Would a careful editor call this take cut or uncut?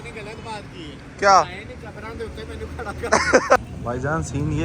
cut